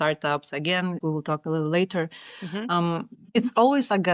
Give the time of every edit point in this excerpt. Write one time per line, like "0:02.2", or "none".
0:01.0